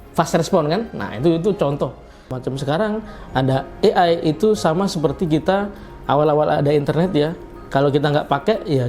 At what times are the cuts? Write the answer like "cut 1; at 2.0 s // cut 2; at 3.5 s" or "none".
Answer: cut 1; at 2.3 s